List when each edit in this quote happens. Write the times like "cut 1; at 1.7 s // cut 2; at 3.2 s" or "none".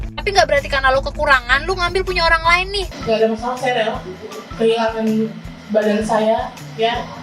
cut 1; at 2.9 s